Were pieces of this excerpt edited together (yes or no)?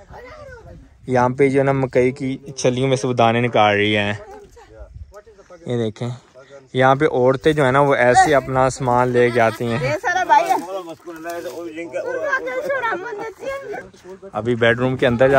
yes